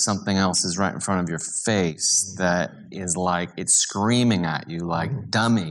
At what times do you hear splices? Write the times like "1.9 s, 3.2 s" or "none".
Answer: none